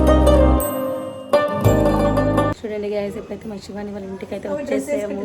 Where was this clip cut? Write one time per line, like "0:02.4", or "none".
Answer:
0:02.6